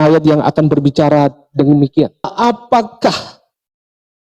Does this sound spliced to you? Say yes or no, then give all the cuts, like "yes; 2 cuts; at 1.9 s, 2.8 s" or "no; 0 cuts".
yes; 1 cut; at 2.3 s